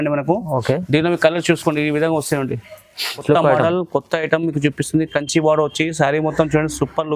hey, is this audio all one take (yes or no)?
no